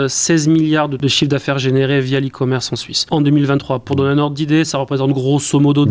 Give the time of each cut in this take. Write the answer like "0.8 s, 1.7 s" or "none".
1.0 s, 3.0 s